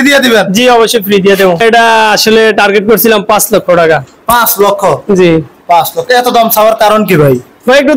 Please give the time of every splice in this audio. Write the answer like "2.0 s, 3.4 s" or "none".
1.6 s